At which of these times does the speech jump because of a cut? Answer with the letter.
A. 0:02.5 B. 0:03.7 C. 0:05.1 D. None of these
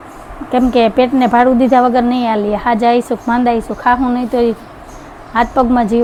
D